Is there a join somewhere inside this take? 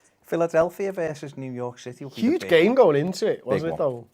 yes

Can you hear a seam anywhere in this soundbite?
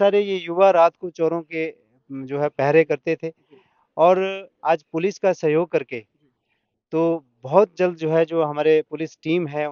no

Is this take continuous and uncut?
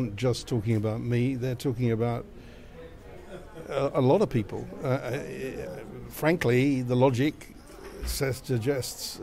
yes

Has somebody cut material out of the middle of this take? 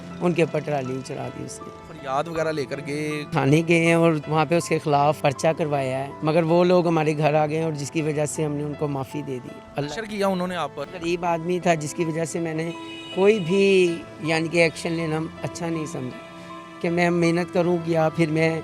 yes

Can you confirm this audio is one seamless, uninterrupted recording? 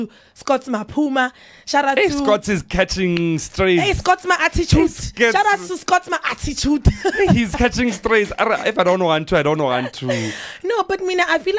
yes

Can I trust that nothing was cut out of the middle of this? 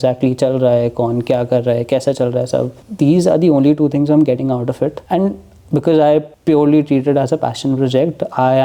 no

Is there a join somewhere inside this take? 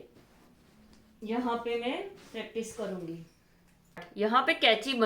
yes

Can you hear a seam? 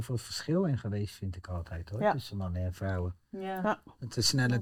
no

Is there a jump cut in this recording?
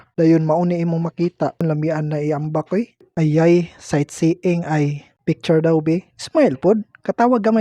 yes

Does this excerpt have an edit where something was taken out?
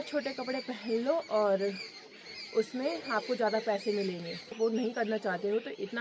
yes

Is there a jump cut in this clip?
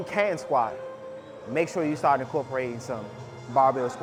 no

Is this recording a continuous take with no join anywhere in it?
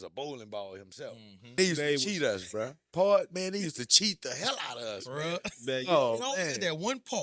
no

